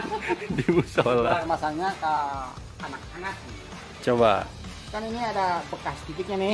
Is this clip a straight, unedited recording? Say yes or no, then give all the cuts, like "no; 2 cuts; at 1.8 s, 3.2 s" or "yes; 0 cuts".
no; 1 cut; at 1.4 s